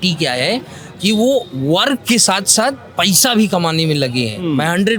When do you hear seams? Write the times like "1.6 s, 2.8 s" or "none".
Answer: none